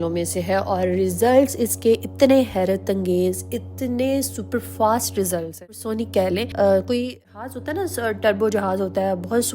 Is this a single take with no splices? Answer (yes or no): no